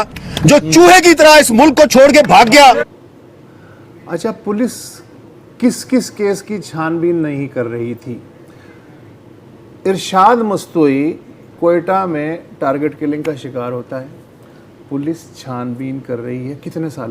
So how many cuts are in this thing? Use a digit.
1